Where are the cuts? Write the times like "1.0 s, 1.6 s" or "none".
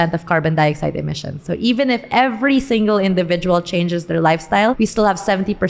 4.8 s